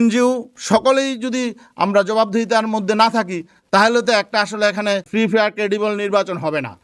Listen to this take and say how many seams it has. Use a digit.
0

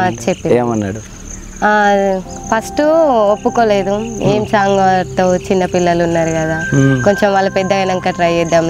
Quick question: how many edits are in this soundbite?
0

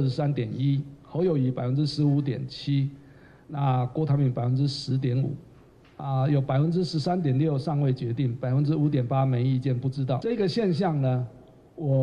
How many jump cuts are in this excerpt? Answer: 1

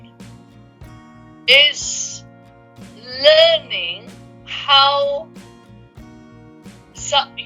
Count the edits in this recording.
0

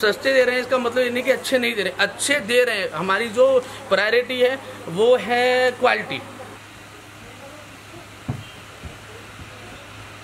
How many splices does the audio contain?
1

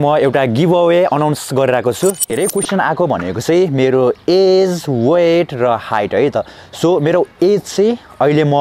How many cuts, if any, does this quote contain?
1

